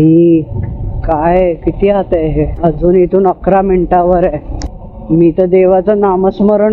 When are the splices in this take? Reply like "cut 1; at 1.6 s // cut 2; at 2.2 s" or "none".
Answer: cut 1; at 2.5 s

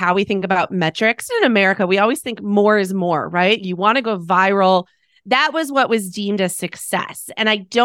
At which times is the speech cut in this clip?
cut 1; at 1.3 s // cut 2; at 3.6 s

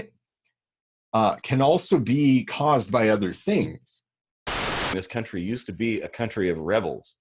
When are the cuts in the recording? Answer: cut 1; at 4.7 s

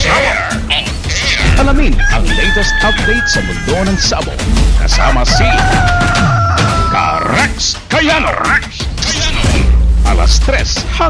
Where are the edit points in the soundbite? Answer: none

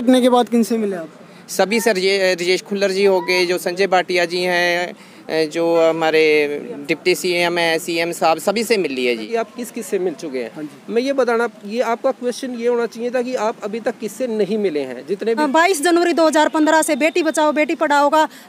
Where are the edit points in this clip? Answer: cut 1; at 9.3 s // cut 2; at 15.4 s

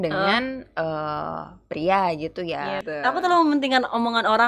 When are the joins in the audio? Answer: cut 1; at 2.8 s

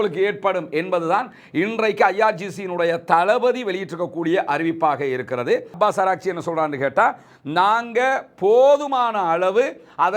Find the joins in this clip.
cut 1; at 5.7 s

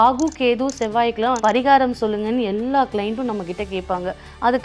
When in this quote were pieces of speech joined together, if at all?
cut 1; at 1.4 s

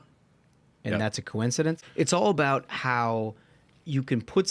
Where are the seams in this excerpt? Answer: cut 1; at 1.8 s

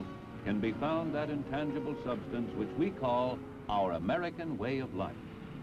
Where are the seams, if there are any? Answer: cut 1; at 1.1 s

